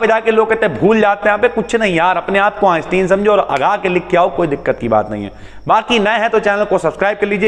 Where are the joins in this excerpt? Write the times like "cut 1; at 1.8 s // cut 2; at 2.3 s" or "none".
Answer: none